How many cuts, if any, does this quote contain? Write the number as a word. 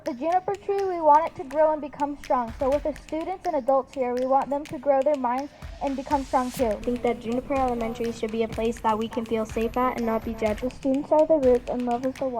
two